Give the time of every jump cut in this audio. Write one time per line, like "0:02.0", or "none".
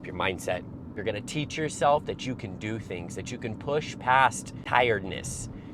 0:00.9
0:04.5